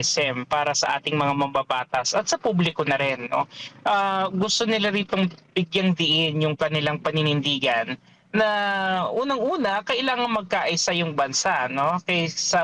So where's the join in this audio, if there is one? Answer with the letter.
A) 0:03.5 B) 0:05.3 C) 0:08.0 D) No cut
D